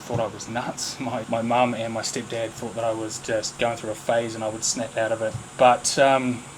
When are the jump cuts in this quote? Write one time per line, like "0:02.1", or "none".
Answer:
0:01.2